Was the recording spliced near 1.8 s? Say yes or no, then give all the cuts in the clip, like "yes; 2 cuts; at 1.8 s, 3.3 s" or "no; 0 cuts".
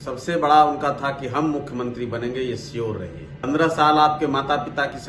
no; 1 cut; at 3.4 s